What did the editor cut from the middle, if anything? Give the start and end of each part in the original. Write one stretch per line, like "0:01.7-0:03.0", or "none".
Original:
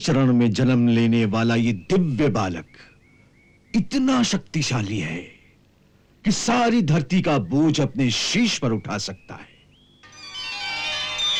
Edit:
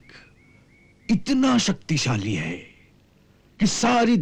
none